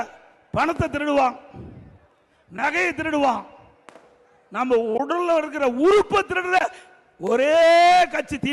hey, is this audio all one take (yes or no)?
yes